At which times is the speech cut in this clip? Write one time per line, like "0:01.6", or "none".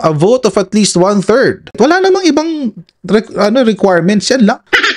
0:01.7